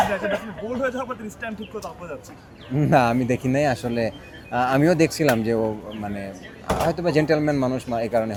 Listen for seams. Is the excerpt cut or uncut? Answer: uncut